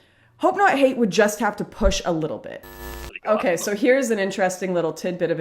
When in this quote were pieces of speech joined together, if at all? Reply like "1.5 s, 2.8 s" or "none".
2.8 s